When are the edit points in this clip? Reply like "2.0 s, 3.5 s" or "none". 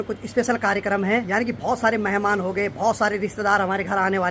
1.3 s